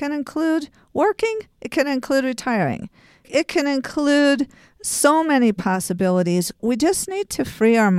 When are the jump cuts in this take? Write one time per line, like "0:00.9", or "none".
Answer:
0:03.3
0:06.6